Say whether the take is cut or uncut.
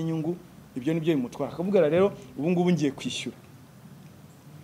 uncut